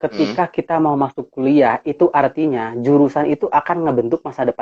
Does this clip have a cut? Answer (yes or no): no